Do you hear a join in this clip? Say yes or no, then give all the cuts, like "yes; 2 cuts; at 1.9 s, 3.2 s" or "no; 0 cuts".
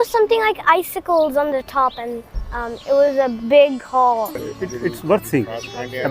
yes; 1 cut; at 4.5 s